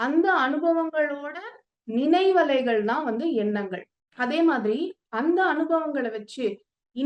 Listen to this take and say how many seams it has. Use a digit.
0